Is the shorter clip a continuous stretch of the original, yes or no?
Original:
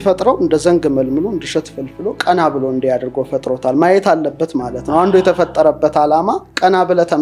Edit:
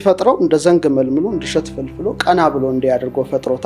yes